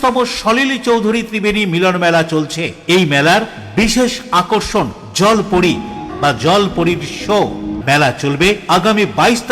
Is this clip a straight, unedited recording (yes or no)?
no